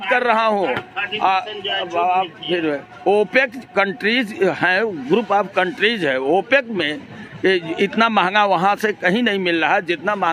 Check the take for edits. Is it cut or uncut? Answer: uncut